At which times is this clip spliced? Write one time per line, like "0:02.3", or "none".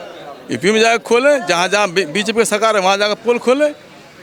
none